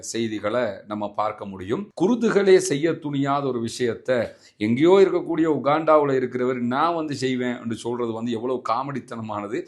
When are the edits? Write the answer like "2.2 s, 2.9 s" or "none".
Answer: 1.9 s